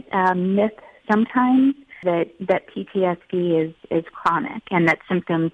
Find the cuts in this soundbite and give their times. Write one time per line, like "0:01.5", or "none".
0:02.0